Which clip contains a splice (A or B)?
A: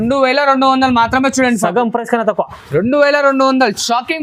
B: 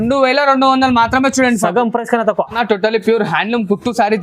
B